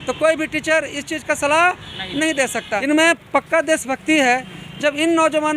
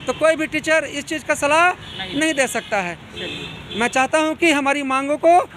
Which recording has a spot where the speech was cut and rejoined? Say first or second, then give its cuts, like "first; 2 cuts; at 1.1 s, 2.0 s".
first; 1 cut; at 2.8 s